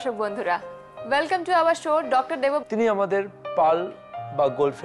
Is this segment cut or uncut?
uncut